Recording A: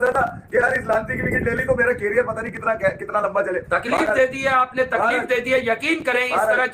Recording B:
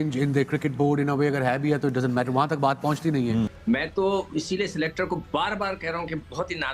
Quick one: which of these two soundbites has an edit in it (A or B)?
B